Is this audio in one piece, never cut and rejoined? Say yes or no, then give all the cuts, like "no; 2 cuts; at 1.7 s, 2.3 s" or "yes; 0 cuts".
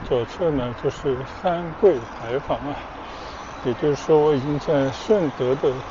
yes; 0 cuts